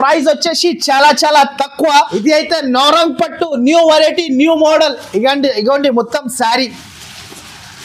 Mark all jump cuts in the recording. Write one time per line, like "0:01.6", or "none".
0:02.1